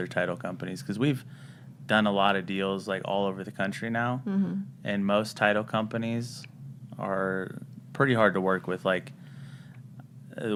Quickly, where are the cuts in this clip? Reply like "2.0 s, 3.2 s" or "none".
none